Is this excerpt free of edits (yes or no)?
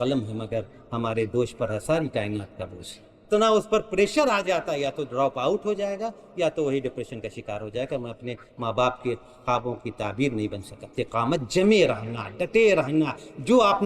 no